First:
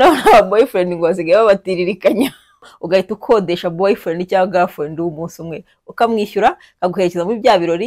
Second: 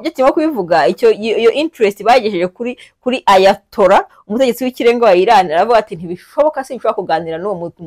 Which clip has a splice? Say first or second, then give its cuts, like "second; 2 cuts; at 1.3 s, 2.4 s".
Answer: first; 1 cut; at 2.7 s